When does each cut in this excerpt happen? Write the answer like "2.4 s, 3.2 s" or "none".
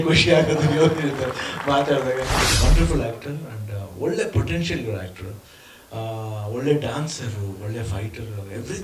2.5 s

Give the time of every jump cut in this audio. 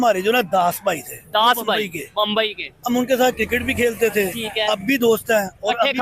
none

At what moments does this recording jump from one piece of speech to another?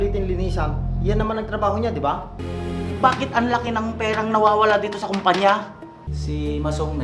2.4 s, 6.1 s

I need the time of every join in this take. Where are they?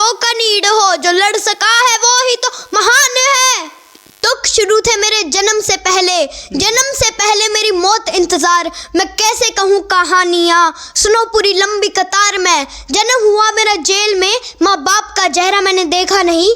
4.2 s

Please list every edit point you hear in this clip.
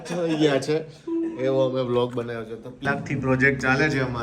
2.8 s

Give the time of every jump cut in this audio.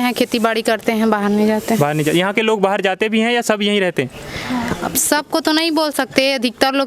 none

